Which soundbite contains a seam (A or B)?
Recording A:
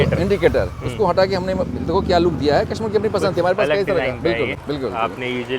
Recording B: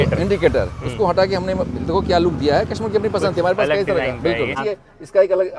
B